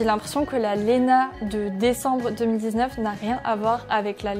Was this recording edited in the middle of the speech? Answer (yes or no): no